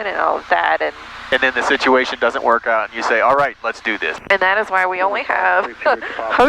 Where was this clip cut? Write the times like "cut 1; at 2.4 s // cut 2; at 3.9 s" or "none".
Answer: cut 1; at 4.2 s

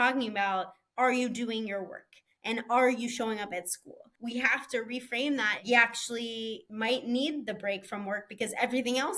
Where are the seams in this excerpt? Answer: cut 1; at 4.1 s // cut 2; at 5.6 s // cut 3; at 6.6 s

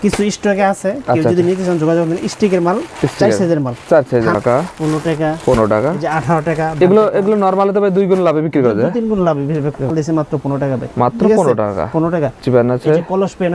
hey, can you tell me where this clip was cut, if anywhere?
cut 1; at 4.3 s // cut 2; at 9.9 s // cut 3; at 12.4 s

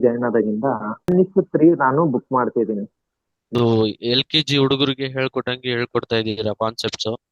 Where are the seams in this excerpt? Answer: cut 1; at 1.1 s // cut 2; at 3.5 s

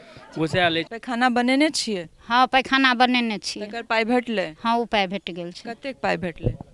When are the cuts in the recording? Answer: cut 1; at 0.9 s

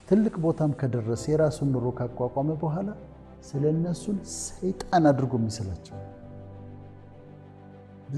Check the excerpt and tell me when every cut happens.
none

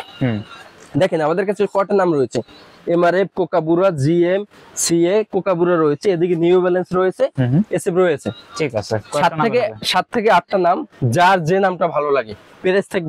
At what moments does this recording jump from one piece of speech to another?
none

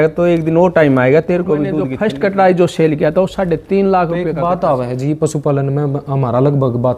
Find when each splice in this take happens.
cut 1; at 2.0 s // cut 2; at 4.3 s

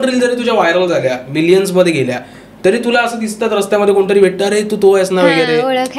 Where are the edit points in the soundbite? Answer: none

